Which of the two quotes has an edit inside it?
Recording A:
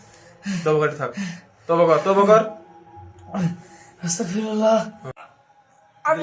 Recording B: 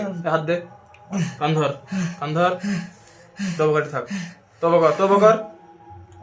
A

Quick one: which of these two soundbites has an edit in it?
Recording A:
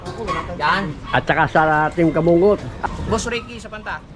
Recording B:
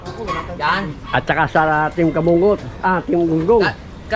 A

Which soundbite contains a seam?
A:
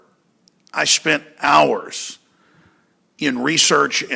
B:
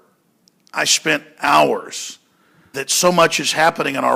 A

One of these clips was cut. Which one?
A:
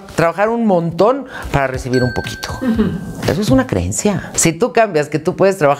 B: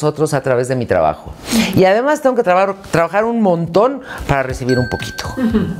A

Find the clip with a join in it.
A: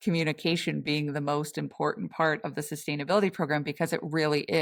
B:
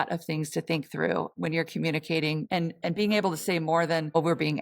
B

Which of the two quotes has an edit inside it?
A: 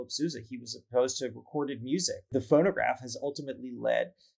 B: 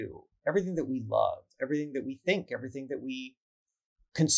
A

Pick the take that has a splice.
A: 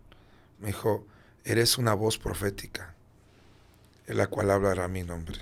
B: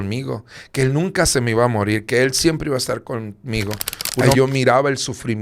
B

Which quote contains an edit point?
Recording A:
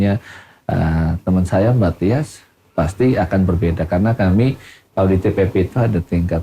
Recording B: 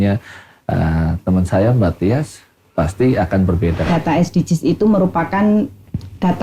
B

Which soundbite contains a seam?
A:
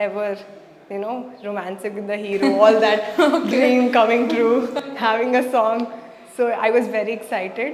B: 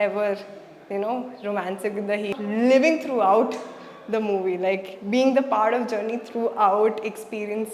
B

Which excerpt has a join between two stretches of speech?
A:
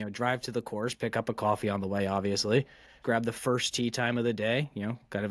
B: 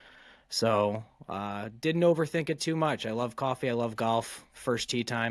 A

